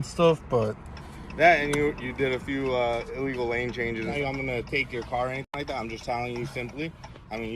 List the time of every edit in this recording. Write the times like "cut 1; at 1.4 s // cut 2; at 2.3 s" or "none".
cut 1; at 4.2 s